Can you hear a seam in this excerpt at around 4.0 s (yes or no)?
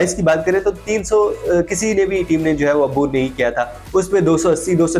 no